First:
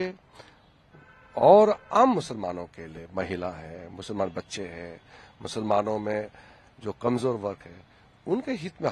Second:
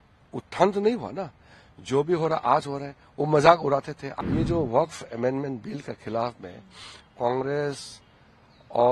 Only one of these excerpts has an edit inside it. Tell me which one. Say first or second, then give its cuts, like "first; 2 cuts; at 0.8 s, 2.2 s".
second; 1 cut; at 4.0 s